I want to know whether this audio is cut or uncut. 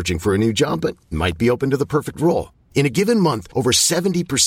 uncut